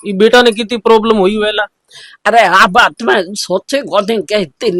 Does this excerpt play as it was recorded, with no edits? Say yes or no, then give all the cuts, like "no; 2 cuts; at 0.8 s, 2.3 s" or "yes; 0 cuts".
yes; 0 cuts